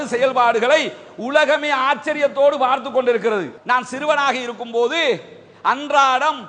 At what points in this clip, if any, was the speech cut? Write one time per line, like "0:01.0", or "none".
0:03.6